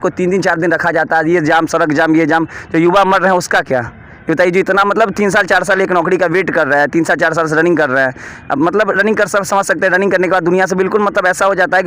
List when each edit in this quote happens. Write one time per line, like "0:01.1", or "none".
none